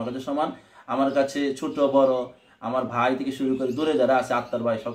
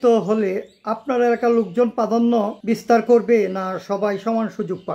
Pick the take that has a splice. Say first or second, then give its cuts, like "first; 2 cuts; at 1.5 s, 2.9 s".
second; 1 cut; at 2.6 s